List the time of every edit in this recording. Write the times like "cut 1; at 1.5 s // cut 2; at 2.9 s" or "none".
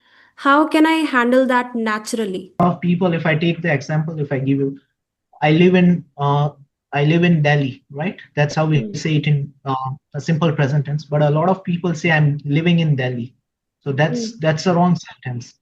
cut 1; at 2.6 s